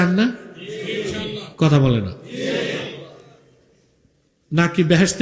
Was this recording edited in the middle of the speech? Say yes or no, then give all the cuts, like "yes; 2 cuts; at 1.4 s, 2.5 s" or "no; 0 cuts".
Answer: no; 0 cuts